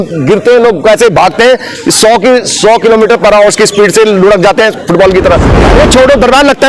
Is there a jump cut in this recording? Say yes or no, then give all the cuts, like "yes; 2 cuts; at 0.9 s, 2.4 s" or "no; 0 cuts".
yes; 1 cut; at 5.5 s